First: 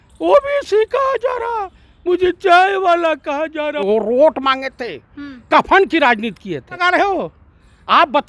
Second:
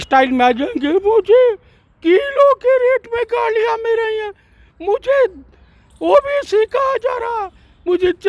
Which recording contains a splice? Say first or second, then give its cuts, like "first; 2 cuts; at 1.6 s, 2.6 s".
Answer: first; 2 cuts; at 3.8 s, 6.8 s